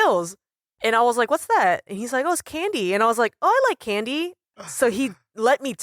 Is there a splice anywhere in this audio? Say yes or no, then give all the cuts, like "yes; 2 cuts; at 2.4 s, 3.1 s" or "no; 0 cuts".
yes; 1 cut; at 4.6 s